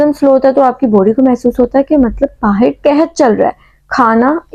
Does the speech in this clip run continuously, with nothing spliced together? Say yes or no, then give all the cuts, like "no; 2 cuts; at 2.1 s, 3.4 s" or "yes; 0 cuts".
yes; 0 cuts